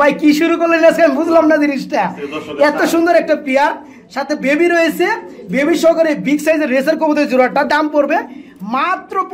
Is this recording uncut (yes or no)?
yes